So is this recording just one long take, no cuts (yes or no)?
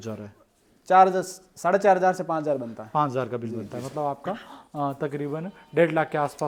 yes